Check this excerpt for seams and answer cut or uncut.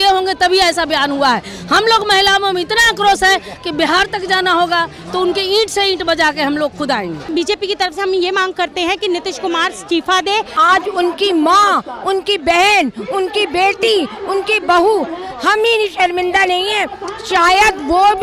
cut